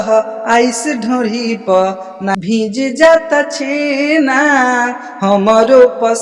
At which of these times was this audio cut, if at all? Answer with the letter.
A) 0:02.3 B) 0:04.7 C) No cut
A